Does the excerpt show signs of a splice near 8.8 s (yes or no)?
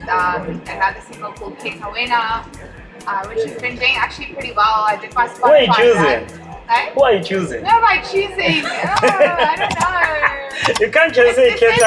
no